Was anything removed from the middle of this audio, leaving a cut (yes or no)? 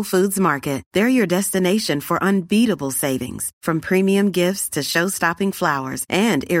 no